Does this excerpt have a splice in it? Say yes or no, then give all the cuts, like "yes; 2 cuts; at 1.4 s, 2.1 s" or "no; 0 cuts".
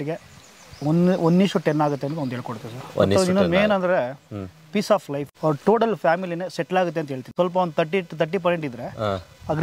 yes; 2 cuts; at 5.3 s, 7.2 s